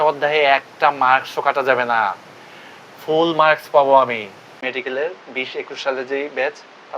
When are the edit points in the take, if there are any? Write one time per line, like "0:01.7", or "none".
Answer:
0:04.8

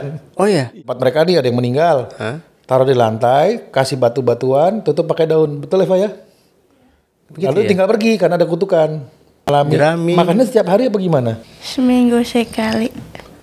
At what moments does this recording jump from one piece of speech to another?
0:01.0
0:09.5

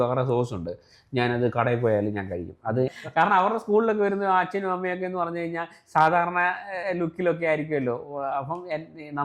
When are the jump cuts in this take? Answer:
0:02.9

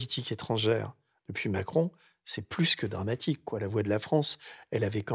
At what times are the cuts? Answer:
none

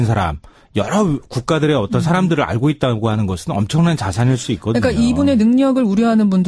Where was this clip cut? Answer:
0:05.0

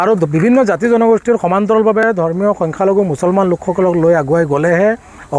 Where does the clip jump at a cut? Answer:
none

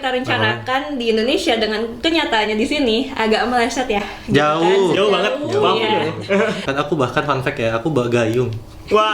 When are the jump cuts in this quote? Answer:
0:06.7

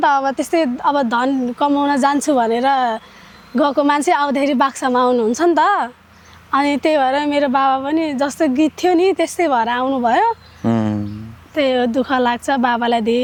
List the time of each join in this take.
none

